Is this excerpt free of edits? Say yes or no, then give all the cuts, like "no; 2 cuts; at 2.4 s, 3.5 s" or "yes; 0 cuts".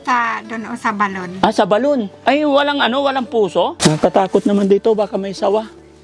no; 1 cut; at 3.8 s